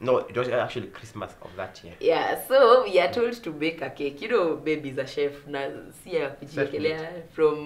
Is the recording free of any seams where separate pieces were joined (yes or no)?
yes